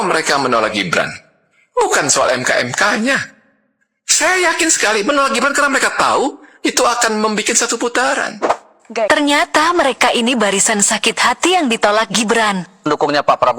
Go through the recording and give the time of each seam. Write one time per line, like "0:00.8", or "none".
0:08.8